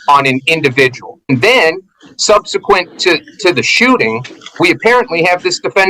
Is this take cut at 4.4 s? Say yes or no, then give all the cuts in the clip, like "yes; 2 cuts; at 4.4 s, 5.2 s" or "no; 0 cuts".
no; 1 cut; at 1.3 s